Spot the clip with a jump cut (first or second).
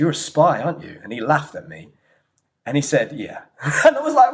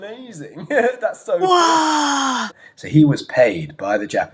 second